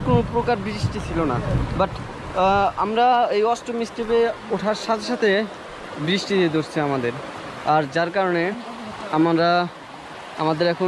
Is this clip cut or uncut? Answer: uncut